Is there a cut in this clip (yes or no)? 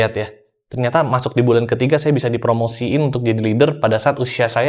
no